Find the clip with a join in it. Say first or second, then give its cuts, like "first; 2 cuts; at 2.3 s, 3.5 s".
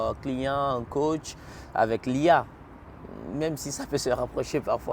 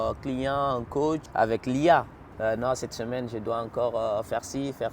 second; 2 cuts; at 1.3 s, 2.2 s